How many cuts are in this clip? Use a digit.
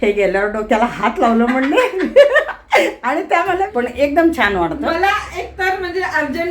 1